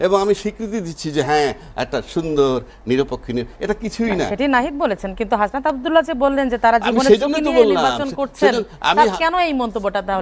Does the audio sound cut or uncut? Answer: uncut